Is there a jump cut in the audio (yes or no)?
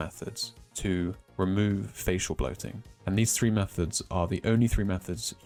no